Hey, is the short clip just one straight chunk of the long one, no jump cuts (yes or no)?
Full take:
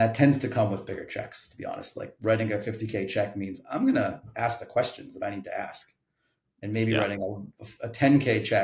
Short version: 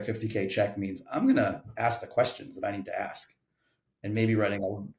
yes